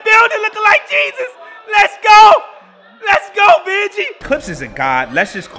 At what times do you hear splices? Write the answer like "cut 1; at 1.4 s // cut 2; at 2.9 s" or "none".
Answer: cut 1; at 4.2 s